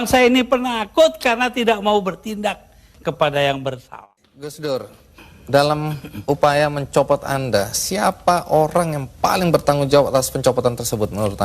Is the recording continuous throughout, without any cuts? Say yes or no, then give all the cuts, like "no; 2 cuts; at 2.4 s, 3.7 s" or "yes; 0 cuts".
no; 1 cut; at 3.9 s